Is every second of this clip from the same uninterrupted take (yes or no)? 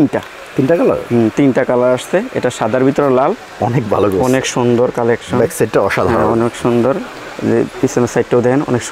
yes